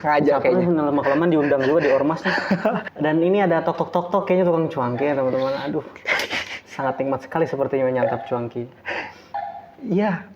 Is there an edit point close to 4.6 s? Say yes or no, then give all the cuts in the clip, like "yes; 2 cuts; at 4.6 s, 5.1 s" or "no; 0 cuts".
no; 1 cut; at 2.9 s